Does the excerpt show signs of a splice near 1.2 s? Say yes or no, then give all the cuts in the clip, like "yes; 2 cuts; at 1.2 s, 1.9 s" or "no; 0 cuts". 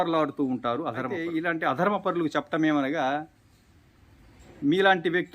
yes; 1 cut; at 1.2 s